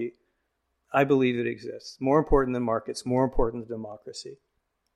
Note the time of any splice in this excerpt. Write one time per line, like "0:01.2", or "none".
none

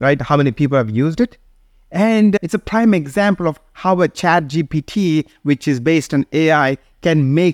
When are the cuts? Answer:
0:02.4

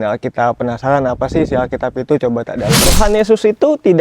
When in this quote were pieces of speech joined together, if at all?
0:02.8

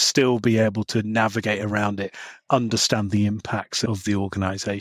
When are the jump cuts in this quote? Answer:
0:03.9

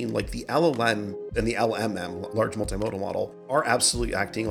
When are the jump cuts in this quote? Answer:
0:01.3
0:02.3
0:03.5

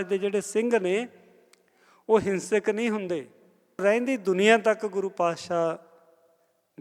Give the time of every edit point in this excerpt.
0:03.8

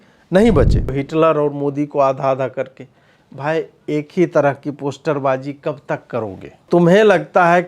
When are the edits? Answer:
0:00.9
0:06.6

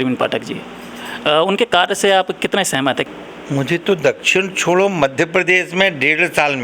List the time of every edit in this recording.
0:03.1

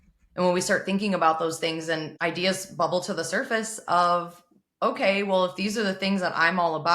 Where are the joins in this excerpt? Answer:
0:02.1

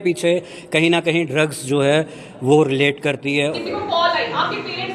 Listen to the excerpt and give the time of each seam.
0:03.5

